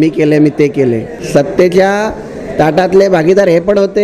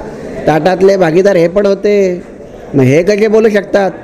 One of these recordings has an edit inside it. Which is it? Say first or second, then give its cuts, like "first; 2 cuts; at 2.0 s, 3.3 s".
first; 1 cut; at 1.1 s